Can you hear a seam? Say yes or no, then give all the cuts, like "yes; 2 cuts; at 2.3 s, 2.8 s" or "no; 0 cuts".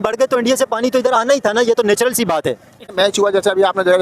yes; 1 cut; at 2.8 s